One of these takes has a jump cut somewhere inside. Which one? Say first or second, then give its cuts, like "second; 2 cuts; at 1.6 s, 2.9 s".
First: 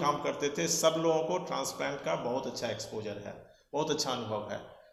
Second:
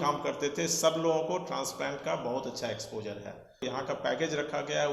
second; 1 cut; at 3.6 s